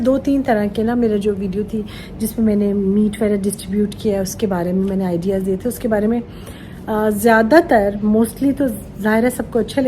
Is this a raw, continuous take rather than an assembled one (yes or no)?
yes